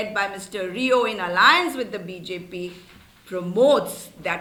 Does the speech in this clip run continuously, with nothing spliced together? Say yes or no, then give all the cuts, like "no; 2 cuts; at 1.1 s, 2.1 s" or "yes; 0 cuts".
yes; 0 cuts